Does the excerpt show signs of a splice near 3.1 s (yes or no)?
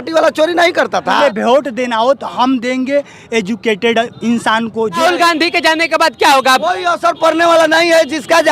no